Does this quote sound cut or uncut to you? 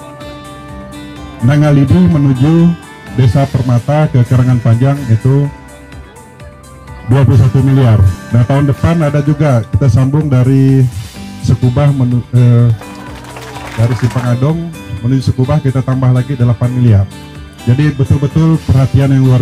cut